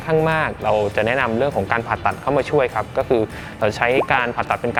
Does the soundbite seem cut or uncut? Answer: uncut